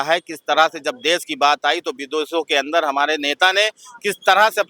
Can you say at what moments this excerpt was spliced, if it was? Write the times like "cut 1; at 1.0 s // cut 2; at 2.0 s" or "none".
none